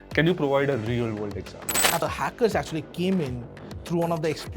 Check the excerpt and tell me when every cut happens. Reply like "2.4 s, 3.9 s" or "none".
2.0 s